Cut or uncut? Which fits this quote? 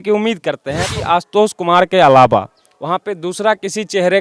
cut